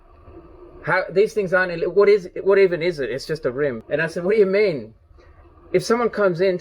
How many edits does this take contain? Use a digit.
1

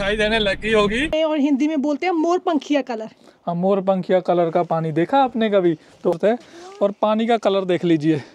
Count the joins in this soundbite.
2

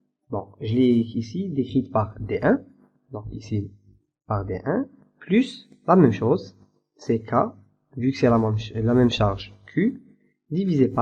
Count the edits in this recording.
0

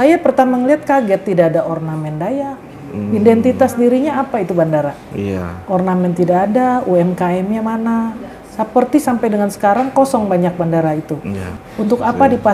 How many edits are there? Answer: 1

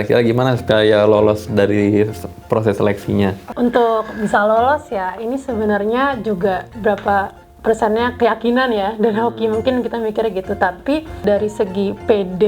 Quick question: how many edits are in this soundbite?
2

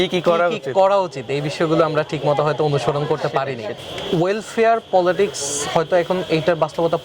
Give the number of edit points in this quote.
1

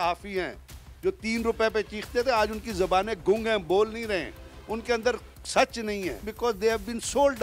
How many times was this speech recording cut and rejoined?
1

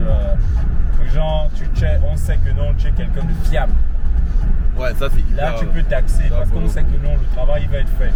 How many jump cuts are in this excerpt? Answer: 0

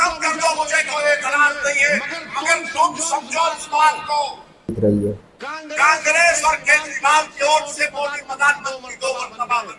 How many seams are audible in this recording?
1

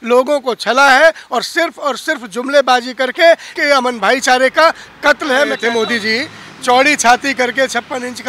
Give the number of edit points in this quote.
2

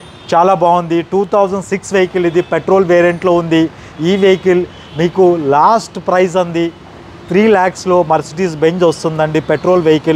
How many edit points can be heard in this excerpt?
0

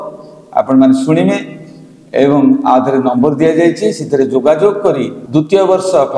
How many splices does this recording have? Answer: 1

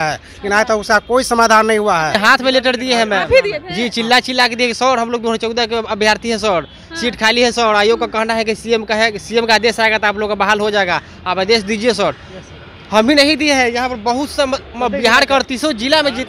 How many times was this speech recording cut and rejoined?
1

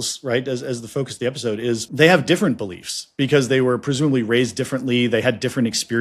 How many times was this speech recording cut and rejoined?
1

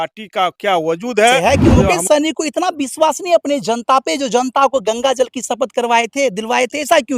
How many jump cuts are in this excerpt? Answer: 1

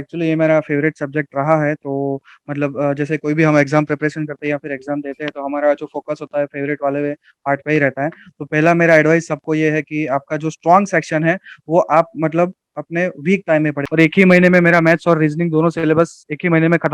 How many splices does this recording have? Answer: 1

